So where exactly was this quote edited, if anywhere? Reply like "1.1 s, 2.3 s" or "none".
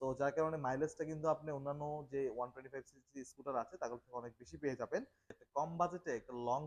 5.2 s